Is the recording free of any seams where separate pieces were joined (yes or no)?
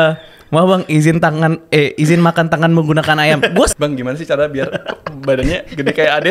no